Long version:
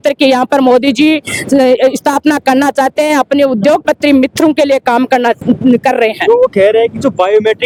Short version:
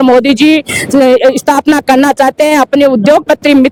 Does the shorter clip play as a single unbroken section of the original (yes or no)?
yes